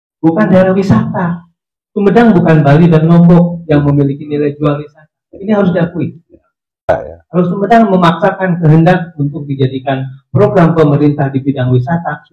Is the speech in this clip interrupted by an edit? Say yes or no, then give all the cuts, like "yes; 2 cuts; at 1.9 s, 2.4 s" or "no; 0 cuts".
yes; 1 cut; at 6.9 s